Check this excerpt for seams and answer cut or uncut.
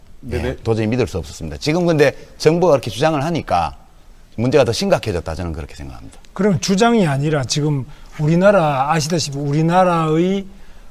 uncut